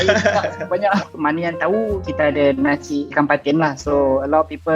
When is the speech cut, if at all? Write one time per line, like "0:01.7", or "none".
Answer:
0:01.1
0:02.1
0:03.1